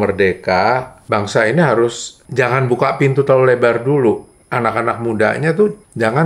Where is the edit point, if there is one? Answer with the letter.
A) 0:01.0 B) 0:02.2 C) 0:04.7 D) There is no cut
A